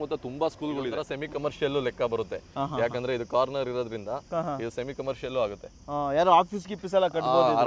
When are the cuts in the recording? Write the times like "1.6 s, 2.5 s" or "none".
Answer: 1.1 s